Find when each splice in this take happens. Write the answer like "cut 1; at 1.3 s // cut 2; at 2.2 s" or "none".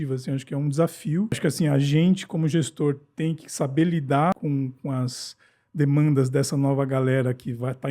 cut 1; at 1.4 s // cut 2; at 4.3 s